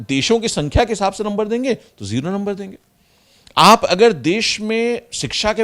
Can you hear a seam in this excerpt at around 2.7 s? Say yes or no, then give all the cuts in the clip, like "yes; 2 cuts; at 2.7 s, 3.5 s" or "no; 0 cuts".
no; 0 cuts